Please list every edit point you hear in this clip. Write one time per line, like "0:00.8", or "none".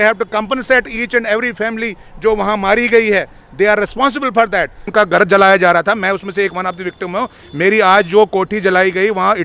0:04.8